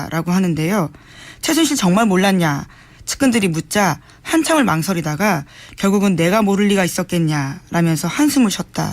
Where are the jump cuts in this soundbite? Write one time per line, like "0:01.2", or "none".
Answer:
0:05.1